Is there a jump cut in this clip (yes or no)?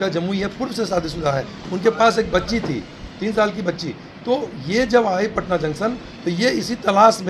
no